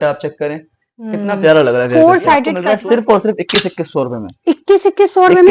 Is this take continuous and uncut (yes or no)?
no